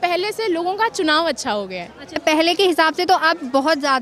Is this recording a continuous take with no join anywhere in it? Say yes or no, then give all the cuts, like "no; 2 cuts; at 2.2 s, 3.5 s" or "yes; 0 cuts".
no; 1 cut; at 2.2 s